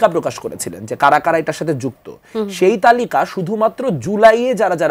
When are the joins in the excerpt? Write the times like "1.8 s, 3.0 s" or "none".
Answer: none